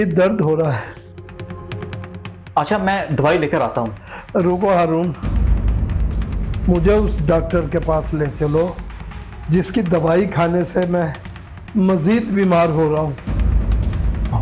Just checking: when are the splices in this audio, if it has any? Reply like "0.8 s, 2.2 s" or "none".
none